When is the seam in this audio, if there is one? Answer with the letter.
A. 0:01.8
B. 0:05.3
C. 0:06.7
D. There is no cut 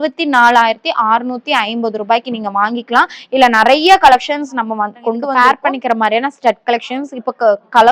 B